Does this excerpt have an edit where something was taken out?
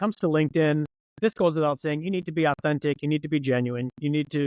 yes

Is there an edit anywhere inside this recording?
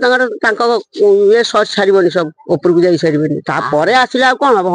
no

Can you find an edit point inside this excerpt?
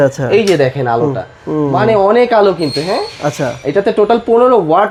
no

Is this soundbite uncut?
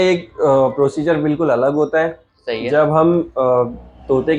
yes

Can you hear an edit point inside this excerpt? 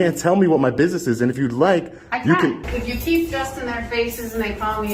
yes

